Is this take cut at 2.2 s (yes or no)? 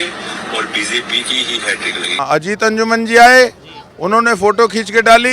yes